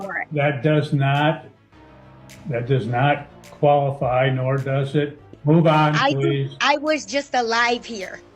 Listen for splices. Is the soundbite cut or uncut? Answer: cut